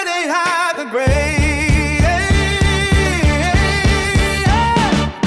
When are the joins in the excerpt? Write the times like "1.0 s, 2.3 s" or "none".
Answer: none